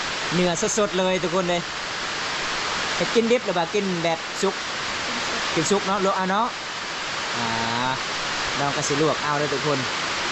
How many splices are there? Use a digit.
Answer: 0